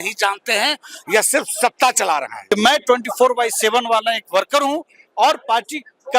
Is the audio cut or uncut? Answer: cut